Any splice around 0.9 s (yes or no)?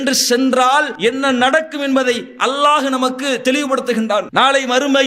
yes